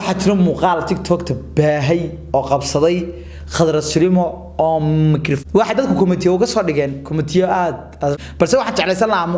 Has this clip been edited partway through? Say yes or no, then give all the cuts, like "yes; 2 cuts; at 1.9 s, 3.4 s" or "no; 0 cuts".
yes; 2 cuts; at 5.4 s, 8.1 s